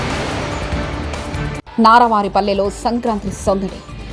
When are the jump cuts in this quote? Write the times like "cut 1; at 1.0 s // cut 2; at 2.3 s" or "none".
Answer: cut 1; at 1.5 s